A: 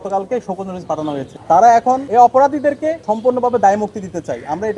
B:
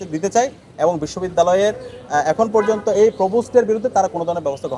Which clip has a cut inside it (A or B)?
A